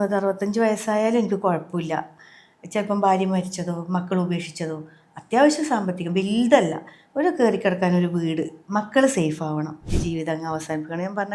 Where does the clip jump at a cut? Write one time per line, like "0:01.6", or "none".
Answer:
0:09.8